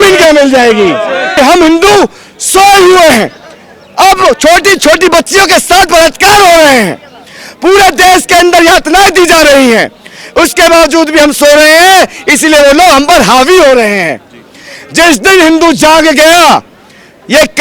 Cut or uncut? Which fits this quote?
cut